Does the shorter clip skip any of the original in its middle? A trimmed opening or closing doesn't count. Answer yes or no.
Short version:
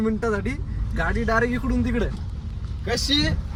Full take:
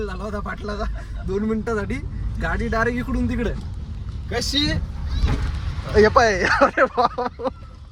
no